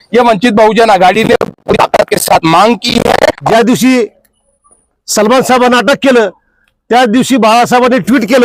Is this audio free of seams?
no; 1 cut; at 3.4 s

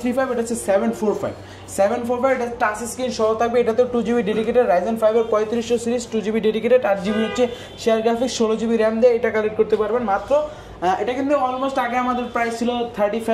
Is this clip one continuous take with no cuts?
yes; 0 cuts

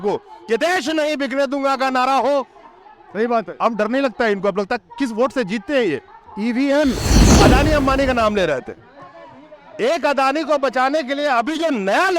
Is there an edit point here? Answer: yes; 1 cut; at 7.2 s

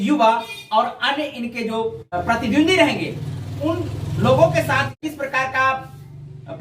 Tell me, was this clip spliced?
yes; 2 cuts; at 2.2 s, 5.0 s

